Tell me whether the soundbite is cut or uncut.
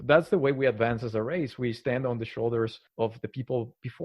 cut